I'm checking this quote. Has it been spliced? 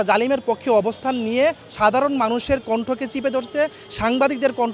no; 0 cuts

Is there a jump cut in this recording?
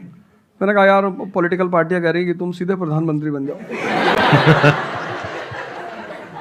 no; 0 cuts

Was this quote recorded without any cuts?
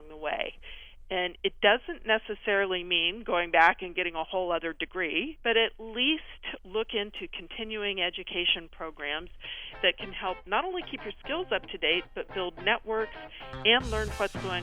no; 2 cuts; at 5.3 s, 9.7 s

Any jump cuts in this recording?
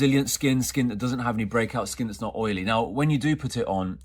no; 0 cuts

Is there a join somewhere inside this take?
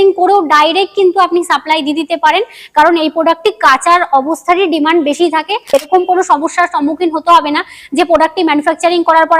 yes; 1 cut; at 5.7 s

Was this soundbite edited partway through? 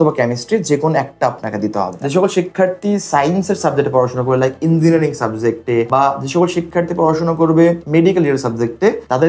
yes; 1 cut; at 1.9 s

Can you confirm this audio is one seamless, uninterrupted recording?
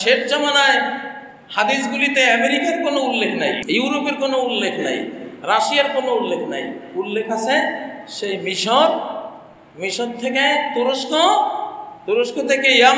no; 1 cut; at 3.6 s

